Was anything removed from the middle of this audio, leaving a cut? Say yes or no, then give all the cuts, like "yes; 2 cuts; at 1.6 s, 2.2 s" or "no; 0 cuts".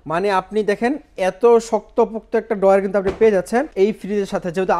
yes; 1 cut; at 3.7 s